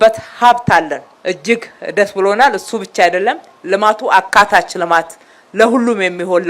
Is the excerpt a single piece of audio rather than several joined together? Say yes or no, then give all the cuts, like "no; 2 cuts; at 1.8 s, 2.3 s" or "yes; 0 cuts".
no; 1 cut; at 1.1 s